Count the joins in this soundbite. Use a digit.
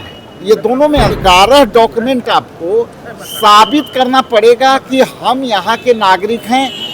1